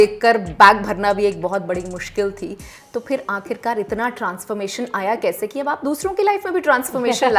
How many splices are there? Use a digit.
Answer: 0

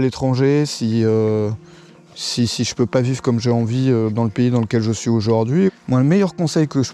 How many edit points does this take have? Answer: 1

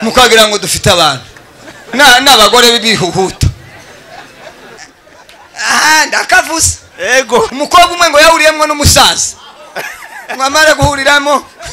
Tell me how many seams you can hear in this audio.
2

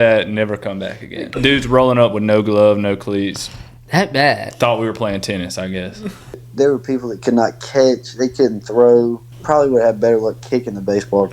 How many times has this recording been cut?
3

